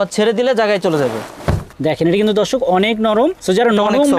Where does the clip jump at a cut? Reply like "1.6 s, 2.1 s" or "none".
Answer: 1.7 s